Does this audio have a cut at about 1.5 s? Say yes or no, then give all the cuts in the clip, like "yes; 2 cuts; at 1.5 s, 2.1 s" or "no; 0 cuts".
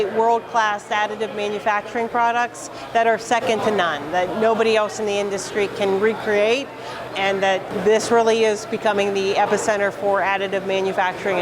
no; 1 cut; at 7.1 s